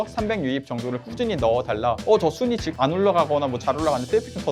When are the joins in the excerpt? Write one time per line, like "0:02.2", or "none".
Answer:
0:02.0
0:02.7